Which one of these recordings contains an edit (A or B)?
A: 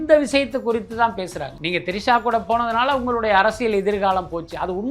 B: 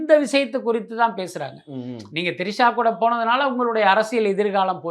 A